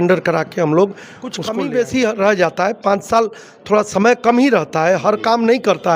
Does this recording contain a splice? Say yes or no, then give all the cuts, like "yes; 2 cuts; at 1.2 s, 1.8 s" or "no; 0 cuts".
yes; 1 cut; at 1.4 s